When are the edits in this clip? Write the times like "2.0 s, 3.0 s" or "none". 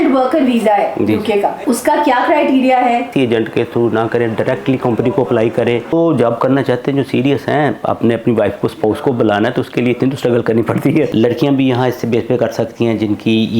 1.6 s, 3.1 s, 5.9 s, 11.1 s